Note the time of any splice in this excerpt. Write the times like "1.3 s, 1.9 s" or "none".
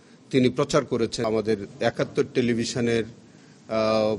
1.2 s